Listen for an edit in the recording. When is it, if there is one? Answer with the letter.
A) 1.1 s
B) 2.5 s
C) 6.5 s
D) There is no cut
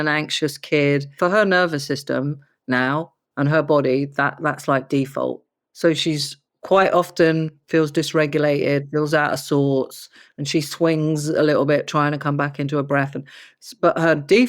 A